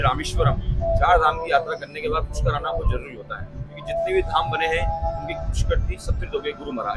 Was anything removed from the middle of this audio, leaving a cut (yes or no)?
no